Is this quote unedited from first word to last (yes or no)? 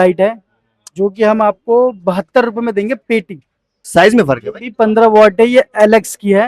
no